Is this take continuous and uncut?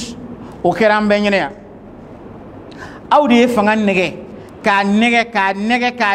yes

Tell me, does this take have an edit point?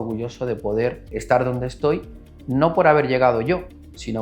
no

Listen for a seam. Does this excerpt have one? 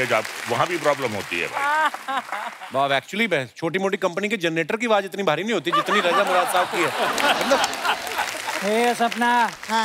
yes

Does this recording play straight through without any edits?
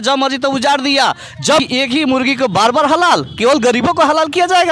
no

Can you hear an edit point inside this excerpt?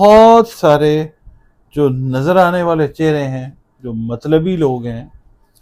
no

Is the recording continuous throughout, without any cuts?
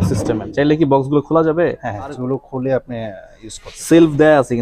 no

